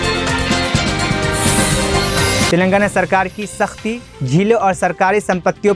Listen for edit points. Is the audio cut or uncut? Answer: uncut